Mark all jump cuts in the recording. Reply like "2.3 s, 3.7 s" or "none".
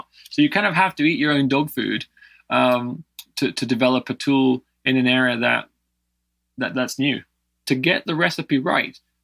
7.6 s